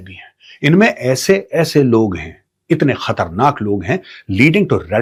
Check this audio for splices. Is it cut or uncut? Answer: uncut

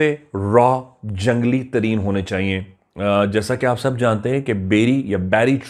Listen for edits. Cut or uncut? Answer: uncut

